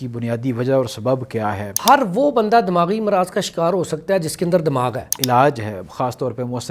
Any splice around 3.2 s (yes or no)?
no